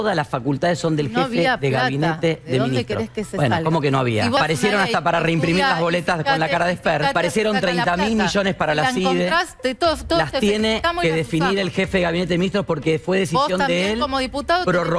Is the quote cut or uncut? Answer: cut